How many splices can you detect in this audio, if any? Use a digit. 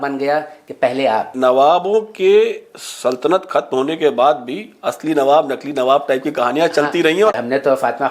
2